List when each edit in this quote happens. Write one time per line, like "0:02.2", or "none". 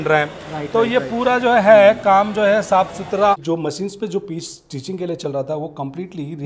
0:03.4

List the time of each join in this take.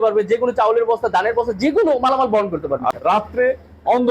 0:02.9

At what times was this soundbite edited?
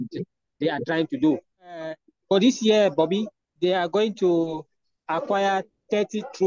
0:02.1
0:03.4

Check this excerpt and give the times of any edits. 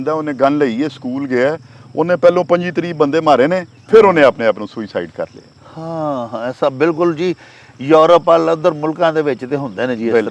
none

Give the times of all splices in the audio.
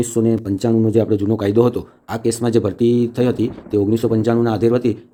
none

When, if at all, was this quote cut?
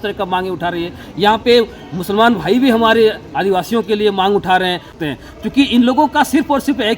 0:04.9

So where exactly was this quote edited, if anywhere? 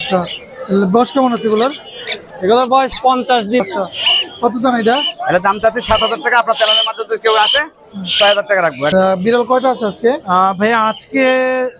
0:03.6
0:08.9

